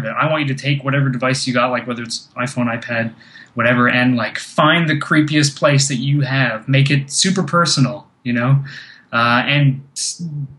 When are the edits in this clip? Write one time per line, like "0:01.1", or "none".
none

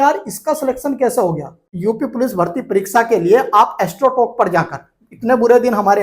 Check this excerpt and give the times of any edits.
0:01.6

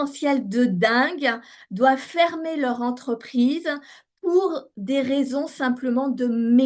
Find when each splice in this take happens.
none

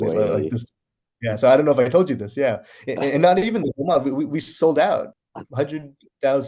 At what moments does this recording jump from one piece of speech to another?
0:05.2

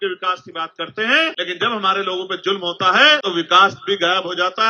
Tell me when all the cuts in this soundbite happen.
0:01.3
0:03.2

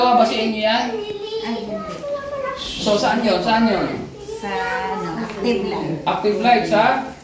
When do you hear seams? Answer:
none

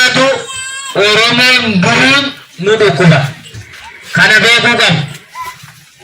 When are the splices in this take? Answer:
none

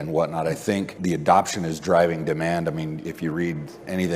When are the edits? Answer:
0:00.9

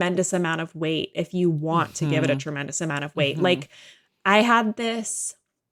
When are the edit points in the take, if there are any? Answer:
none

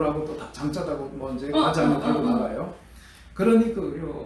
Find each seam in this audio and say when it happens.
none

